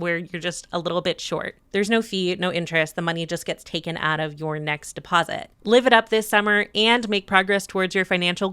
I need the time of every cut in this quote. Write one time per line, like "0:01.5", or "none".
0:01.6
0:05.5